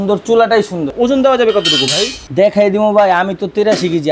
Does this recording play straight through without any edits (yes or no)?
no